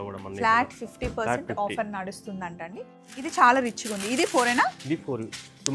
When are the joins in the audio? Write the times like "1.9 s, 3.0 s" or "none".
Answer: 2.7 s